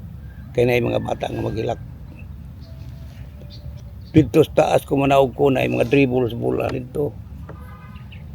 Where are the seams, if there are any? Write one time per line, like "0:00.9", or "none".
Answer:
0:03.8